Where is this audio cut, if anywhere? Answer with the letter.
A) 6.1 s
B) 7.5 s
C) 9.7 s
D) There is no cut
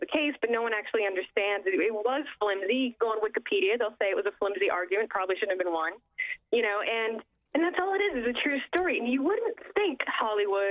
D